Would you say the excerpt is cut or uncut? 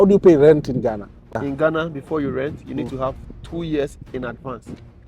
cut